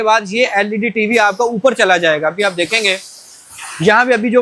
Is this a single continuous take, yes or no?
yes